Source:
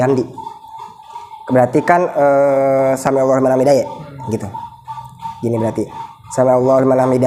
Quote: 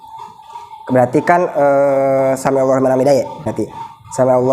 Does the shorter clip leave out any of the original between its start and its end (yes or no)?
yes